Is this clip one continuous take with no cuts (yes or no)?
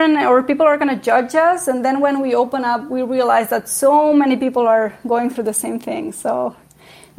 yes